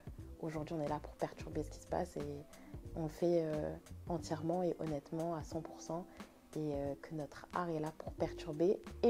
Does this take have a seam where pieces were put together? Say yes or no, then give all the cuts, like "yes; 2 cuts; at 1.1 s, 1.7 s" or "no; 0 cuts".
no; 0 cuts